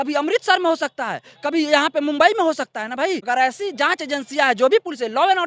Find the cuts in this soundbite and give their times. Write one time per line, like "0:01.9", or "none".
none